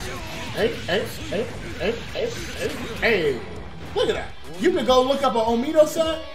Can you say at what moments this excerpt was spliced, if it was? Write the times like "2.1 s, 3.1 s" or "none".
none